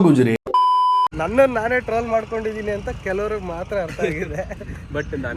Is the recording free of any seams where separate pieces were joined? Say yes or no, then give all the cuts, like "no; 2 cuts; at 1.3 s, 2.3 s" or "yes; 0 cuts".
yes; 0 cuts